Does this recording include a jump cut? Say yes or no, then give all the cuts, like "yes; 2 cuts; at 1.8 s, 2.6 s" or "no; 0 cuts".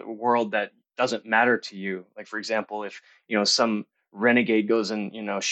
no; 0 cuts